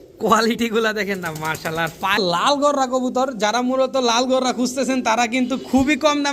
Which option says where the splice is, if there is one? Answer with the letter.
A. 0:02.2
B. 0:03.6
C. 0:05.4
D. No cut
A